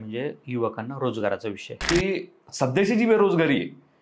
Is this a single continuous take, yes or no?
no